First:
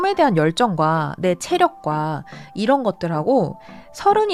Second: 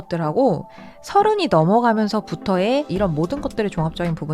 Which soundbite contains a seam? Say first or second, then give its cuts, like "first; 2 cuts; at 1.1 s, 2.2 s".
second; 1 cut; at 2.9 s